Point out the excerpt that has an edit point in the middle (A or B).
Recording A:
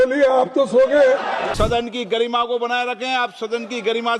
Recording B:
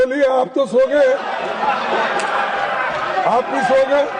A